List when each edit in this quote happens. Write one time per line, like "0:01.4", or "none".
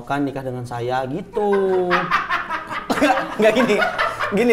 none